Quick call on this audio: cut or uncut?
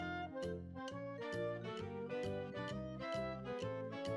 uncut